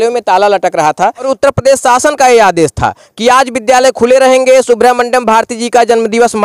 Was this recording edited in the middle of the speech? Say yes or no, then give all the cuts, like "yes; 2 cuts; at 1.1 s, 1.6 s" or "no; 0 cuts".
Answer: yes; 1 cut; at 1.3 s